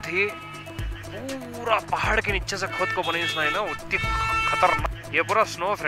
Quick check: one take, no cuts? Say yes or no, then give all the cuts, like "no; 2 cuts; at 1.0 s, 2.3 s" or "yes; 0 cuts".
no; 1 cut; at 4.9 s